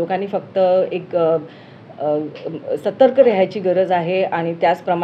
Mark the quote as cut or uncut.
uncut